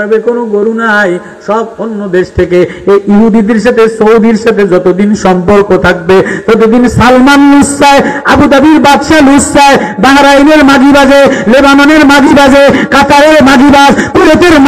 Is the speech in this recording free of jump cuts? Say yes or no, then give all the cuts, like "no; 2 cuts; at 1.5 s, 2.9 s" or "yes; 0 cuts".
yes; 0 cuts